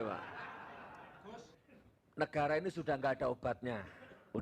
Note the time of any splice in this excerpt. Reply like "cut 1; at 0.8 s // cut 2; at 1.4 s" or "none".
cut 1; at 1.6 s